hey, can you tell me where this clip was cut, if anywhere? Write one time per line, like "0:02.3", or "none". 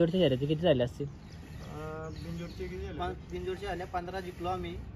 none